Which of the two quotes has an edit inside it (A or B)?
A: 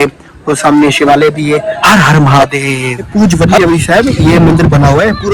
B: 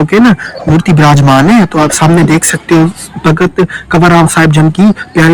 A